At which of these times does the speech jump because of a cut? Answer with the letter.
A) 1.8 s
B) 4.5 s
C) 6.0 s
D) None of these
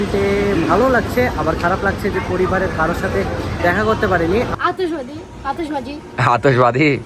B